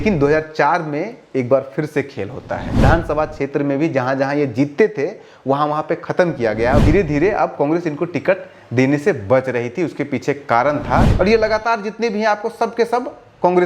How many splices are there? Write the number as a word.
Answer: three